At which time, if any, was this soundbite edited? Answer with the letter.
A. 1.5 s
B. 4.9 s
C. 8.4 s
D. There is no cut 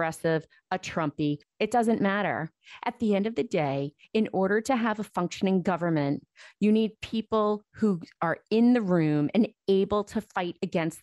A